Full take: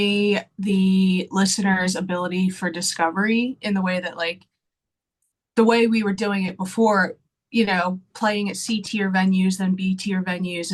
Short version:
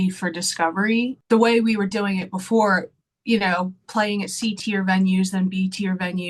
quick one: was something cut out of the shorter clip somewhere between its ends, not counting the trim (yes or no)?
yes